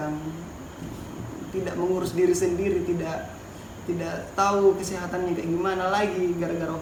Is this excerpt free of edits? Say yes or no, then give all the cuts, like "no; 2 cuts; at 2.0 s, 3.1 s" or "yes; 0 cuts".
yes; 0 cuts